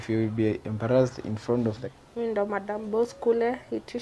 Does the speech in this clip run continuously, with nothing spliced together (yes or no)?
no